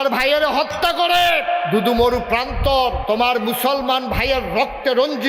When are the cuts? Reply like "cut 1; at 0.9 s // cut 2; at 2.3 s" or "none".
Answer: cut 1; at 3.0 s